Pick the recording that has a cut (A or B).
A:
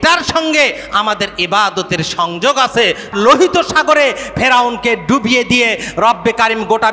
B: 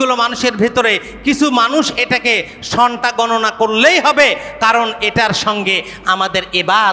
A